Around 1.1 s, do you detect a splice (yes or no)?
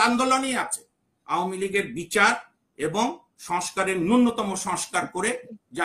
yes